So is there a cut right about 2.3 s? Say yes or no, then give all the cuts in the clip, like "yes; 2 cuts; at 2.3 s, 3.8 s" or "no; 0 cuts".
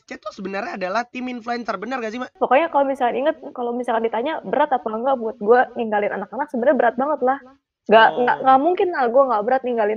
yes; 1 cut; at 2.3 s